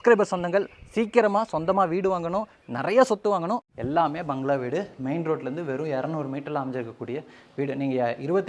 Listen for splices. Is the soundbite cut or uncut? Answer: cut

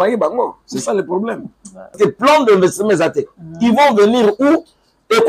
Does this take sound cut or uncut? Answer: cut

